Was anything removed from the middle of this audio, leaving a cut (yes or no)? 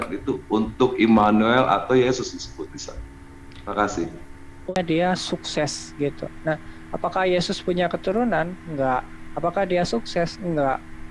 yes